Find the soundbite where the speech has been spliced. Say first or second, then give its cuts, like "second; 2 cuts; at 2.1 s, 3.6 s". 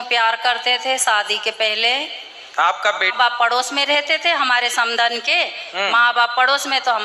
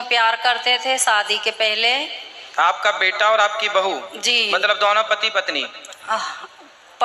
first; 1 cut; at 3.1 s